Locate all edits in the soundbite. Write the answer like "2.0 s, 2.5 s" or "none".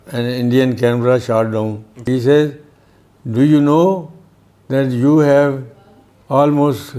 2.1 s